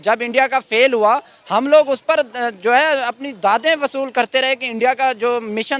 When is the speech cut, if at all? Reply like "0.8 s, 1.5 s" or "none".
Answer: none